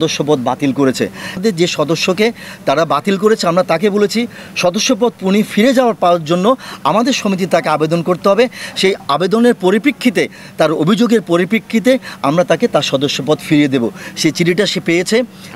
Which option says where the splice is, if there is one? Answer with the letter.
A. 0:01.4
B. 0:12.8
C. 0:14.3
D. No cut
A